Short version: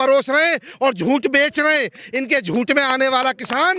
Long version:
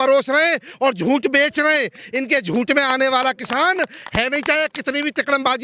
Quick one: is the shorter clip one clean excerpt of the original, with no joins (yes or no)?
yes